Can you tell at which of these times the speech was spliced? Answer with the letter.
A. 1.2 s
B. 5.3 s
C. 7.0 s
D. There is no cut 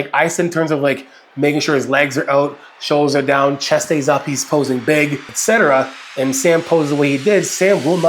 B